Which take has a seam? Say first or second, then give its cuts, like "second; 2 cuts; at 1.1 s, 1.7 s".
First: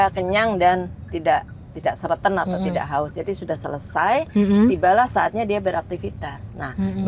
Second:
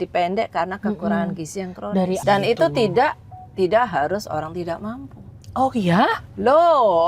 second; 1 cut; at 2.2 s